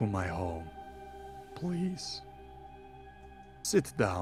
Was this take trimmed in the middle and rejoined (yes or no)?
no